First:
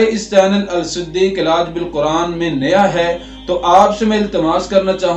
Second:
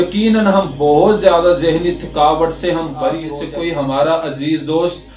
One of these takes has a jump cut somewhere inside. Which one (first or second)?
second